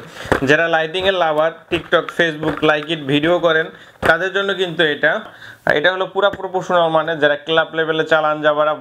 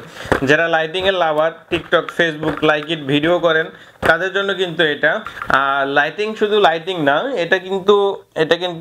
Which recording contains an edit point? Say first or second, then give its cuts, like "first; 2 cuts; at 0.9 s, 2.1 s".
first; 1 cut; at 5.4 s